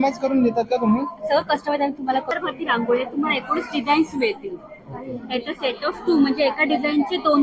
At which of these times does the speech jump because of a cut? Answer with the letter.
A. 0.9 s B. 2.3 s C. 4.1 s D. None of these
B